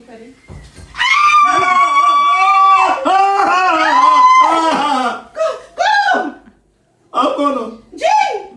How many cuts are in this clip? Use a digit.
0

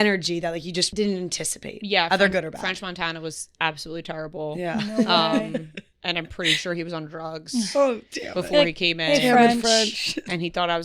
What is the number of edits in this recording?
1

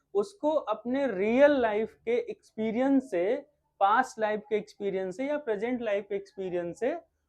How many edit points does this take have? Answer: 0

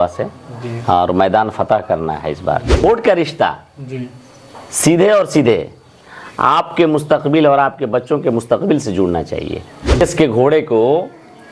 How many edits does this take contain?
2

